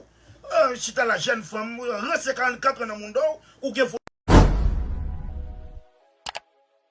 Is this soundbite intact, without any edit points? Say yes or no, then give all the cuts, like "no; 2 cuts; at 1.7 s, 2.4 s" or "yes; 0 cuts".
no; 1 cut; at 4.0 s